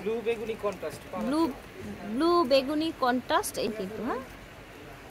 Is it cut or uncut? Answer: cut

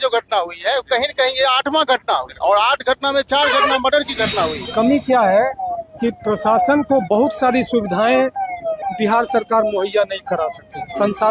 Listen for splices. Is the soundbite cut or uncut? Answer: cut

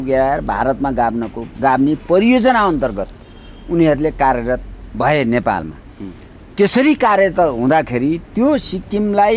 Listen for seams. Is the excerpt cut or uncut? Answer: uncut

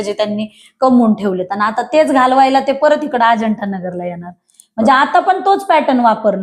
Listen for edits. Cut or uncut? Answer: uncut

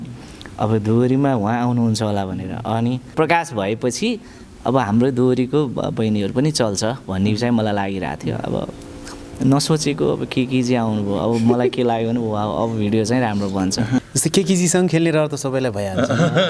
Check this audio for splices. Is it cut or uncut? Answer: cut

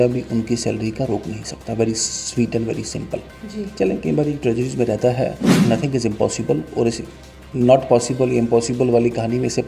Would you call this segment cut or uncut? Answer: cut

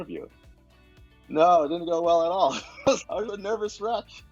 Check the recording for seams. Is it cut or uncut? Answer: uncut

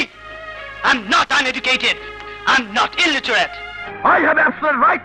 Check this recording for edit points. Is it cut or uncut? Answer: cut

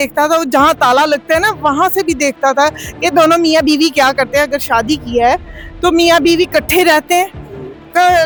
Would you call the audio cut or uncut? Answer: uncut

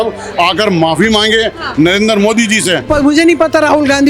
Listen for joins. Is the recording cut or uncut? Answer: cut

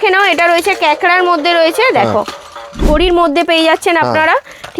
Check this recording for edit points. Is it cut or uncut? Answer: cut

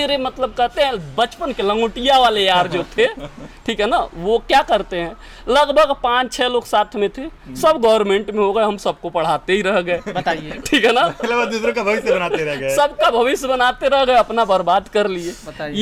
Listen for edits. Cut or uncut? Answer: uncut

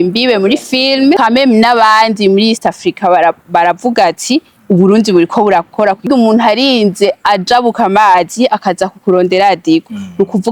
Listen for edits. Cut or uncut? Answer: cut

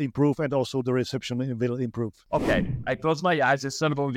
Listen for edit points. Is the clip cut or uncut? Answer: cut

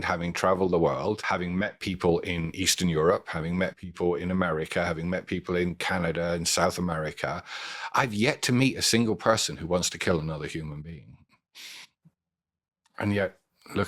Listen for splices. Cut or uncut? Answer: cut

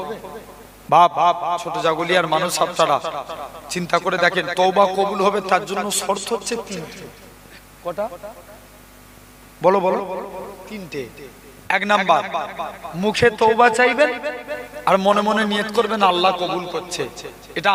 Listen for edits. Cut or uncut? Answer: uncut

